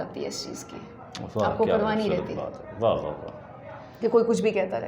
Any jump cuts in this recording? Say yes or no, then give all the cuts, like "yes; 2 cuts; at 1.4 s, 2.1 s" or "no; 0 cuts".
no; 0 cuts